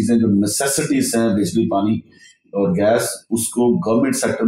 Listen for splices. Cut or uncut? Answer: uncut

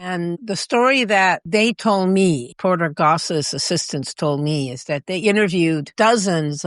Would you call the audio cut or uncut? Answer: cut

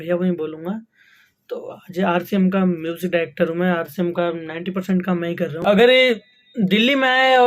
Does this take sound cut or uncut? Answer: cut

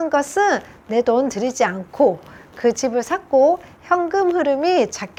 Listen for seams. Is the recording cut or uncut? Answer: uncut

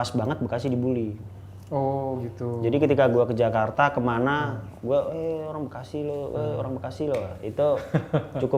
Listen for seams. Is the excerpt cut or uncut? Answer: uncut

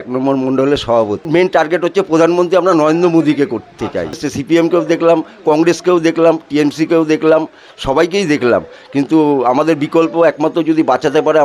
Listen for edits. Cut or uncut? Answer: cut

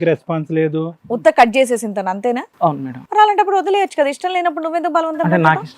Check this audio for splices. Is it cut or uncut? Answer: cut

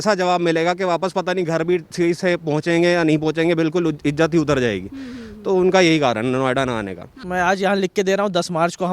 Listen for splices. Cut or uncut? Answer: cut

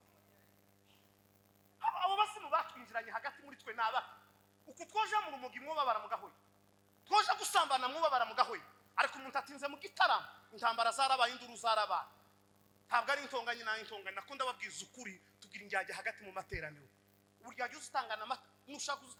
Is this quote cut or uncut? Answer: uncut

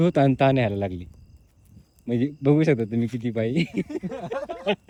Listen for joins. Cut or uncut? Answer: uncut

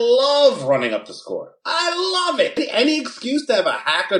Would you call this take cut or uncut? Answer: cut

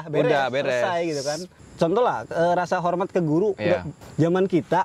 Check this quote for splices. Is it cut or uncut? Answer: cut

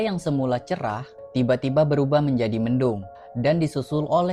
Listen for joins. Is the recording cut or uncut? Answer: uncut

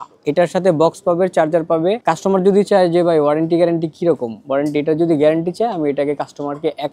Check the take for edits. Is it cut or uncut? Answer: uncut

